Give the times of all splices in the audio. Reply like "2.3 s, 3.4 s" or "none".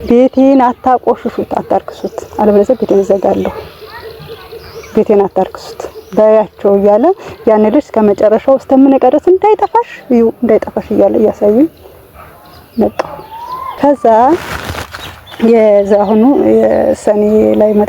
none